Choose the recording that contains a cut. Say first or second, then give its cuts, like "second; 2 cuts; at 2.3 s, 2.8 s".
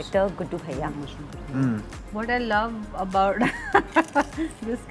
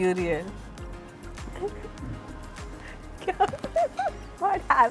first; 1 cut; at 1.9 s